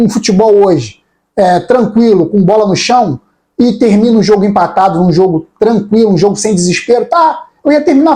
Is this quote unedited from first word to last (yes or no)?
yes